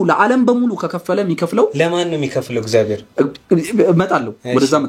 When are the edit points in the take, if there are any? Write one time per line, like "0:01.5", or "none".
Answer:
0:03.0

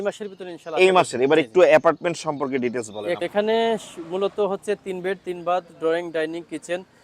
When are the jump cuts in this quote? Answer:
0:03.2

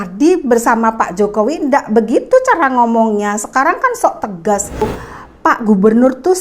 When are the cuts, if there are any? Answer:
0:05.0

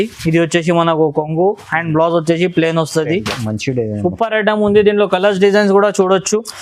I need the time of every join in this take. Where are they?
0:03.2

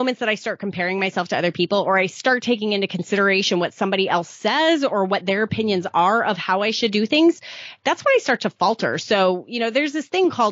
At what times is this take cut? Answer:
none

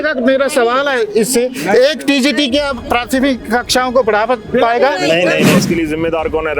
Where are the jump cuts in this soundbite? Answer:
0:05.6

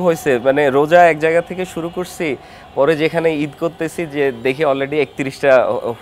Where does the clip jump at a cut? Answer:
none

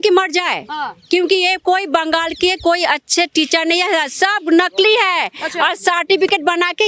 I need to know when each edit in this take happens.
none

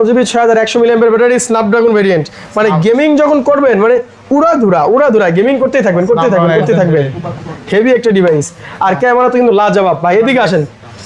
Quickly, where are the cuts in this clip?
none

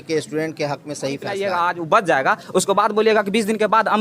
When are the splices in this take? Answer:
0:01.4

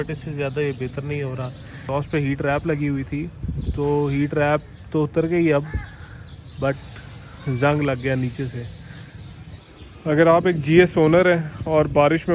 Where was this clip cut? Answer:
0:01.8
0:09.6

